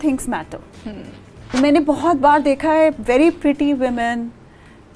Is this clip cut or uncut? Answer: cut